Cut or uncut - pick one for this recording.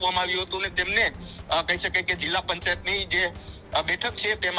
uncut